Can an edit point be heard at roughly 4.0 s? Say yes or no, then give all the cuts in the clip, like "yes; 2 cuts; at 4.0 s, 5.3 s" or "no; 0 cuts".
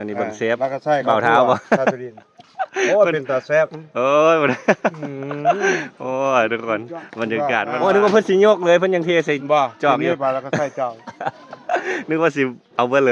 no; 1 cut; at 7.7 s